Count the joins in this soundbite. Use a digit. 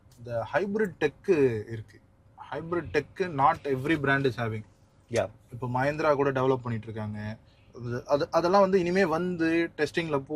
0